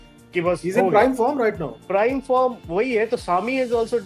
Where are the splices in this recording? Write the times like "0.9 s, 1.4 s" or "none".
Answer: 1.7 s